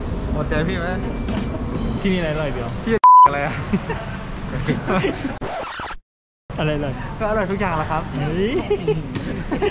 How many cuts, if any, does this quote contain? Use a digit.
1